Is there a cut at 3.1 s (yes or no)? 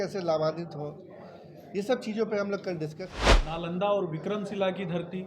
yes